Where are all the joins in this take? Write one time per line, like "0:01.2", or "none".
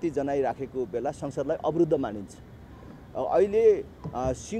none

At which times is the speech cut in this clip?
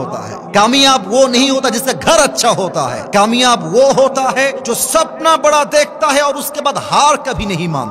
0:03.0
0:04.6

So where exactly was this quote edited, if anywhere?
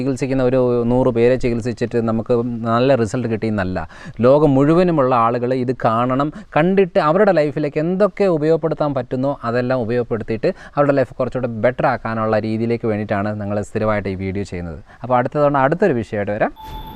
none

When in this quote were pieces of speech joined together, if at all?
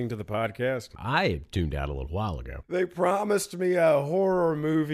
0:00.9
0:02.7

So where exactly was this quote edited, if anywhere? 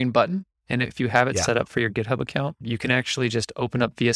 0:00.9
0:02.6

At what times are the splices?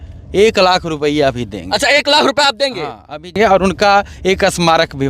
0:03.4

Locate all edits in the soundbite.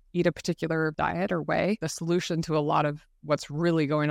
0:00.9
0:01.9

